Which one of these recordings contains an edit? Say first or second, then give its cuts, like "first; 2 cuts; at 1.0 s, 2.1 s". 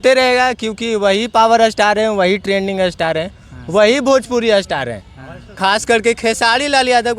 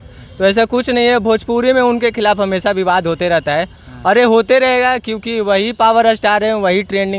first; 1 cut; at 5.5 s